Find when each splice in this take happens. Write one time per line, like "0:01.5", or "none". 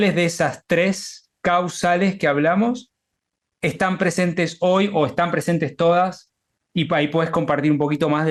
none

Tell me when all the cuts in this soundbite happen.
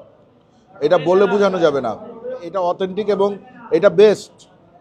0:02.5

